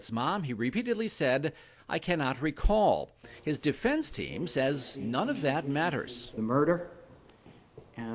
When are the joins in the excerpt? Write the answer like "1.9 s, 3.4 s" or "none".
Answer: none